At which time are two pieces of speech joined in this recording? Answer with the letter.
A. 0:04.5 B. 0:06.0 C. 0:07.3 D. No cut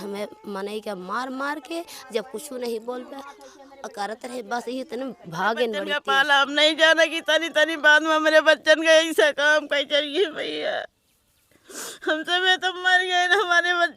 B